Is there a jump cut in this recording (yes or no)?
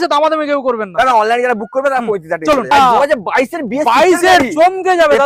yes